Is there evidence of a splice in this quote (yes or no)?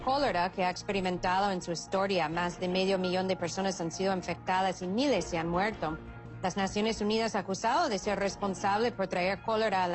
yes